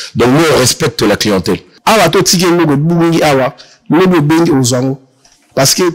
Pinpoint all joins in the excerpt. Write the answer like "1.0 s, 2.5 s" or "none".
1.7 s

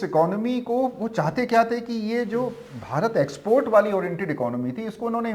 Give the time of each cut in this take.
none

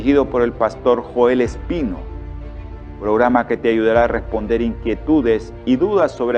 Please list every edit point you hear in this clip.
none

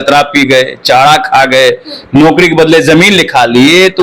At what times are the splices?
none

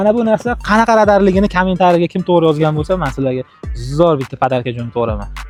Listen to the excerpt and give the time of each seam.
none

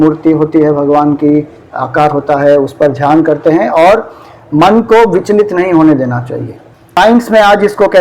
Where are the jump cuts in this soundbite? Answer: 7.0 s

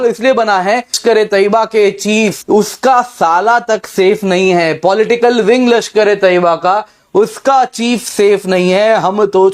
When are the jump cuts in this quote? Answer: 1.0 s, 2.4 s

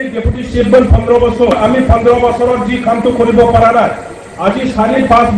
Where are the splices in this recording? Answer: 1.5 s

